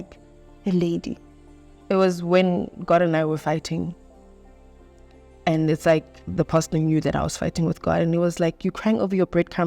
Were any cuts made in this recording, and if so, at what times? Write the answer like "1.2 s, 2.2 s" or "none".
1.8 s